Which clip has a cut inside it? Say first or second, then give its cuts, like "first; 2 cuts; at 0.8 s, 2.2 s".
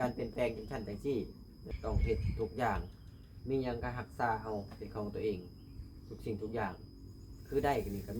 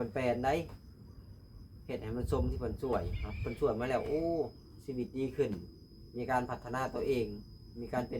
first; 1 cut; at 1.7 s